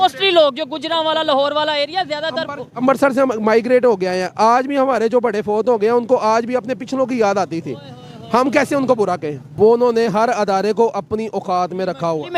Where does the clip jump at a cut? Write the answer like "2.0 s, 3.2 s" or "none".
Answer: 9.4 s